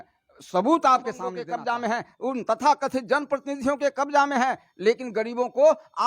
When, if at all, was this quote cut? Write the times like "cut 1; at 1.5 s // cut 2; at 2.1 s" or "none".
cut 1; at 1.5 s